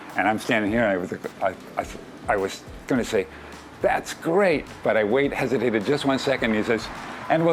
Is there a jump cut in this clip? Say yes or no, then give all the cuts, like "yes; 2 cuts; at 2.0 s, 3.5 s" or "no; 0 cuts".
no; 0 cuts